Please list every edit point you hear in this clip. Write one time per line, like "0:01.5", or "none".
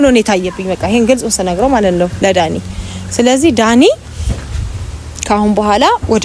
none

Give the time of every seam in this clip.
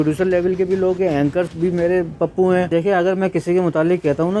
0:01.5
0:02.7

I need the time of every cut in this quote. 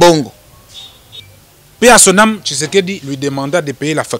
0:01.2

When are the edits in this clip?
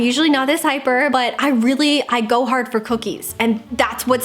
0:01.1

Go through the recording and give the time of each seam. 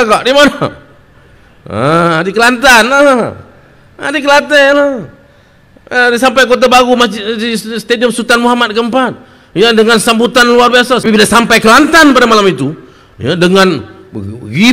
0:11.0

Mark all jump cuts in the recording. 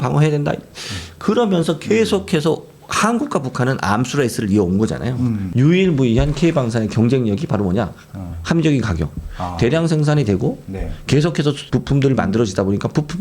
0:05.5
0:11.6

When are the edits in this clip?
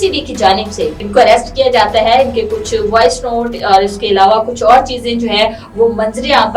0:01.0

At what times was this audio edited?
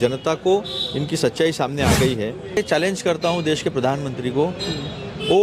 0:02.6

